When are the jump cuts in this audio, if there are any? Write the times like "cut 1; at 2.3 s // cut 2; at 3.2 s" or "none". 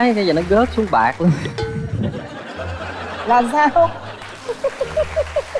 cut 1; at 1.5 s

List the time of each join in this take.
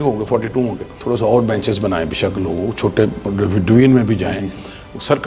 cut 1; at 1.0 s

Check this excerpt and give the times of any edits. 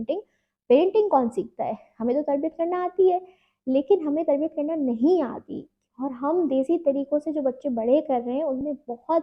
none

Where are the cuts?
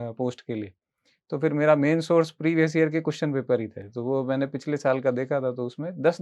none

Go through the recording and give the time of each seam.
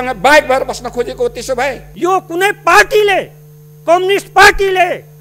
cut 1; at 1.9 s

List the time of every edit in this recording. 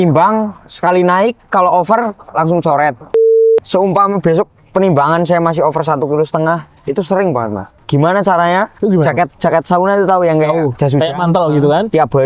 cut 1; at 3.3 s // cut 2; at 7.7 s // cut 3; at 8.7 s

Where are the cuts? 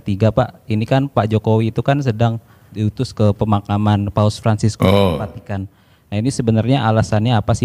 cut 1; at 2.7 s

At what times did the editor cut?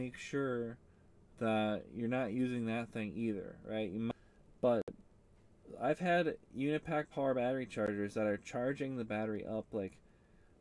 cut 1; at 4.1 s

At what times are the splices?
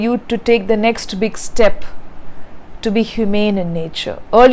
none

